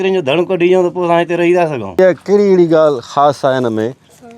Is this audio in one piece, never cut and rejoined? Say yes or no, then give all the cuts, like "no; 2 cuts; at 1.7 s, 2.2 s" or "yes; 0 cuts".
no; 1 cut; at 2.0 s